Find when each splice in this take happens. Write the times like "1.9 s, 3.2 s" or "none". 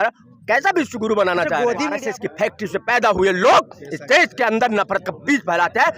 2.0 s